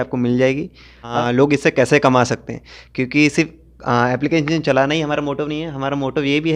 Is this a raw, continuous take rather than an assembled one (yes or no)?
no